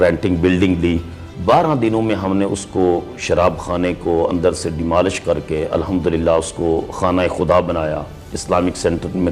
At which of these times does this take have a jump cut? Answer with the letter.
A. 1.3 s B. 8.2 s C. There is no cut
A